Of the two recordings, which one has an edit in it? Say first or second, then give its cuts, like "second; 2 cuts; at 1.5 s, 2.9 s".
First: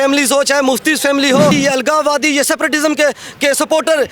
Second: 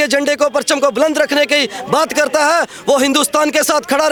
first; 1 cut; at 1.5 s